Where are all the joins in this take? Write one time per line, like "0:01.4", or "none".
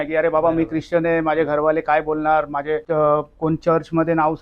0:02.8

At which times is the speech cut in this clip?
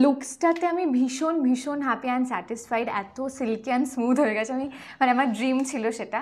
none

